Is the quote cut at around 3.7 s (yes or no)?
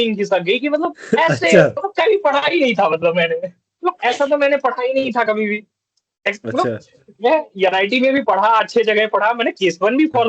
yes